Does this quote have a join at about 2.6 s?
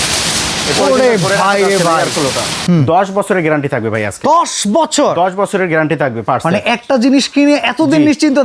yes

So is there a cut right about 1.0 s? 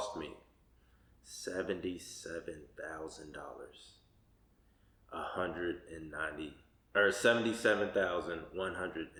no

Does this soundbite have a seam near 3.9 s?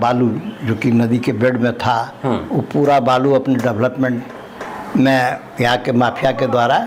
no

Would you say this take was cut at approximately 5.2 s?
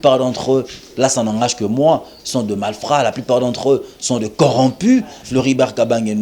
yes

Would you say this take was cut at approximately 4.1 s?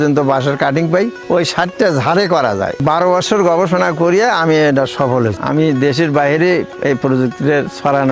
no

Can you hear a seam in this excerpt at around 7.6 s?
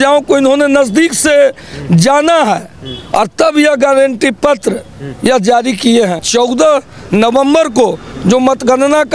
no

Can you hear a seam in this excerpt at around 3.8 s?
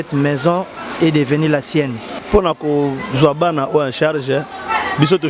no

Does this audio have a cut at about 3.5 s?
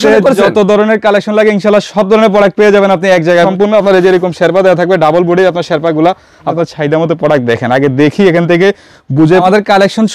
yes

